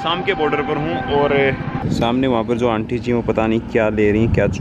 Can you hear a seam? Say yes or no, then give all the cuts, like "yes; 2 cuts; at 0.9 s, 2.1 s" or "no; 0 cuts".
yes; 1 cut; at 1.8 s